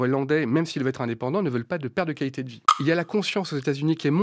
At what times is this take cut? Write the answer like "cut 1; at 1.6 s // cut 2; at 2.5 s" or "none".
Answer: cut 1; at 2.7 s